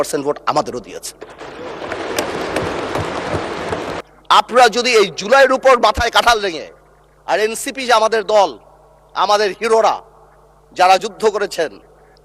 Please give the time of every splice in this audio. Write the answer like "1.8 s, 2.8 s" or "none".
4.0 s